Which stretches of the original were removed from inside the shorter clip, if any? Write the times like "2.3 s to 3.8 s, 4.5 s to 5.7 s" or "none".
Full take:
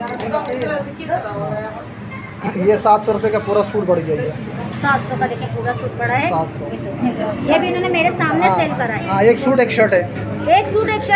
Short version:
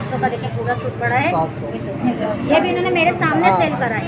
none

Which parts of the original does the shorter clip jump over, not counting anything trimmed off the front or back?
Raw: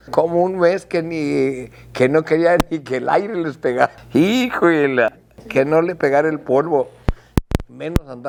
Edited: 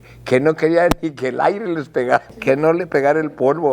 4.0 s to 5.4 s

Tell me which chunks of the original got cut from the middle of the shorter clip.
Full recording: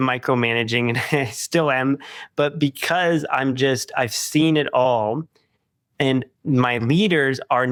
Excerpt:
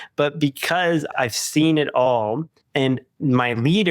3.3 s to 3.9 s, 5.3 s to 5.8 s

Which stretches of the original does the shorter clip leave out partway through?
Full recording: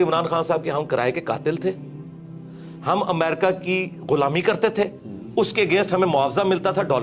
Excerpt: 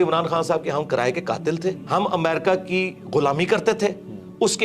1.4 s to 2.4 s

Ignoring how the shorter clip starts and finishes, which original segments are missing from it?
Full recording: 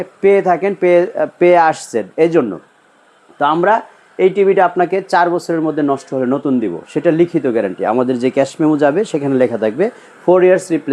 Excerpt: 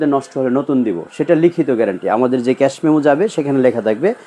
none

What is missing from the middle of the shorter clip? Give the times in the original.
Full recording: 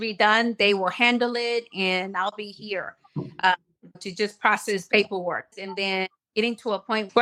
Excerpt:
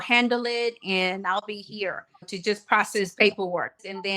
3.0 s to 3.8 s

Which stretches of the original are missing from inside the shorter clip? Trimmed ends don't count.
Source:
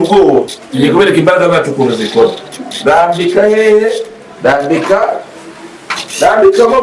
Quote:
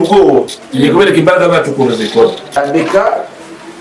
2.6 s to 4.5 s

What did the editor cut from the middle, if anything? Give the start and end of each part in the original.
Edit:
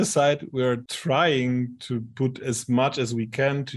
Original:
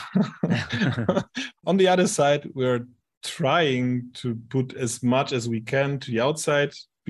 2.9 s to 3.3 s

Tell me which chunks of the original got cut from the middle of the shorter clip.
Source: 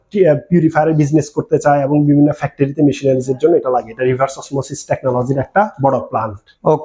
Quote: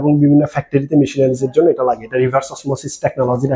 none

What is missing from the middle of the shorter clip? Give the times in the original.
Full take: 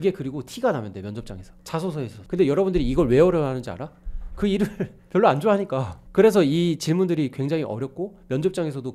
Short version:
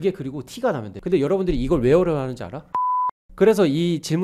0.9 s to 2.2 s, 4.3 s to 5.8 s

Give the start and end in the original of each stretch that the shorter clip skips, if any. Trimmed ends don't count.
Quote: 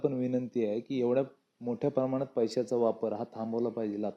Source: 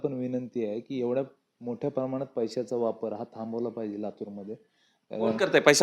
none

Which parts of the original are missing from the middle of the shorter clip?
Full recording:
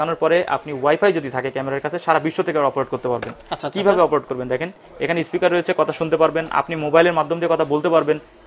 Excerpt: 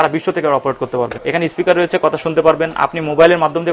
3.3 s to 4.9 s

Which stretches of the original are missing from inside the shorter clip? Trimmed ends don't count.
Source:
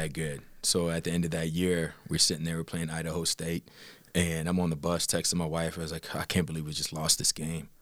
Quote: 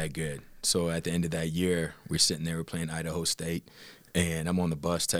none

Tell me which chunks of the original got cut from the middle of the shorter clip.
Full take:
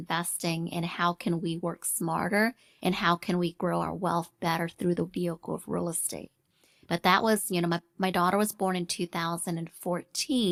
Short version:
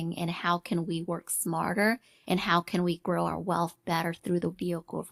none

